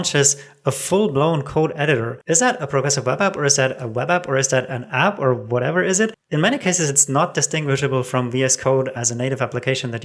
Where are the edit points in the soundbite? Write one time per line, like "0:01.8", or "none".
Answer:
0:02.1
0:06.2